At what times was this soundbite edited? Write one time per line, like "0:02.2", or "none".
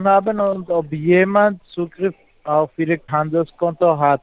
0:03.1